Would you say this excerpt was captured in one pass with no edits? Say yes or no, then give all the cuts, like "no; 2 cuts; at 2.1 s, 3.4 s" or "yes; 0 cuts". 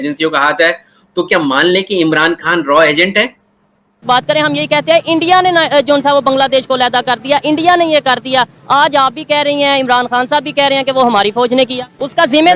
no; 1 cut; at 4.0 s